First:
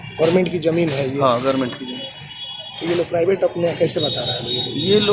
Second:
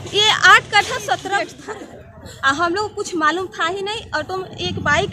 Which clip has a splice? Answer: second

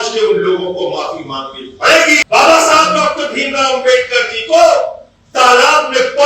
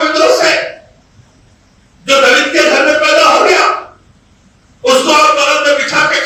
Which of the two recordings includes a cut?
first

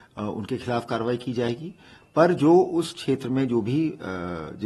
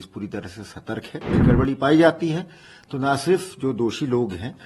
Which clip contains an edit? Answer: second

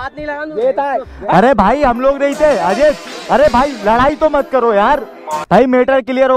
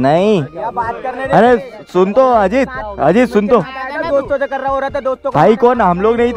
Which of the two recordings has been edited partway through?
first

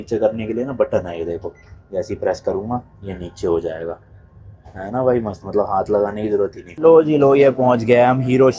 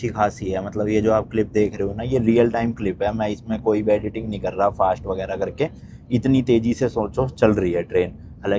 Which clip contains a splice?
first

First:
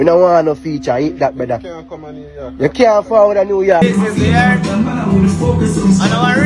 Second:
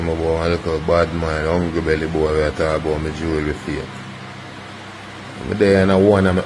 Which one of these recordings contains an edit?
first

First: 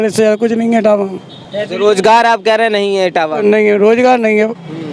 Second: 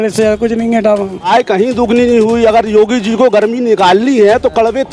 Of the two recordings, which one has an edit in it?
second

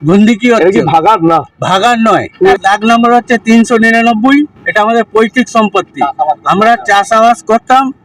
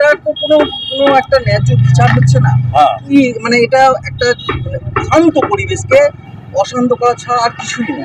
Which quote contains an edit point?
first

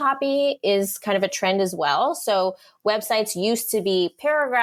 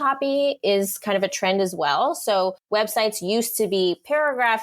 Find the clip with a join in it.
second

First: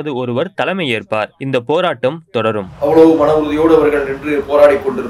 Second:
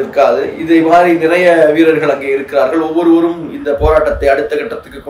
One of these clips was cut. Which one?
first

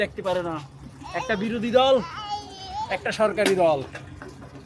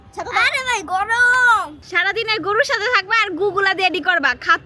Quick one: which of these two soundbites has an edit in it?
second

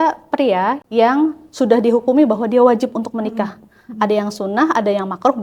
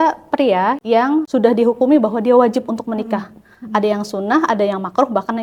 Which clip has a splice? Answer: second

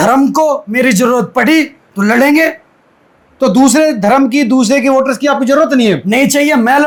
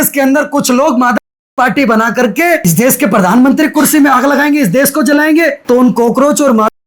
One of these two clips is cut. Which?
second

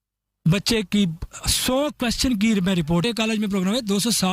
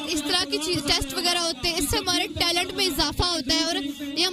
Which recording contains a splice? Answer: first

